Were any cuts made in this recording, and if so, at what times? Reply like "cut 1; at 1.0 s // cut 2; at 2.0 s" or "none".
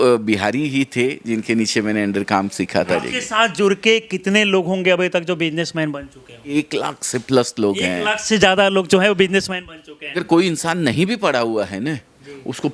cut 1; at 2.9 s // cut 2; at 6.5 s // cut 3; at 10.2 s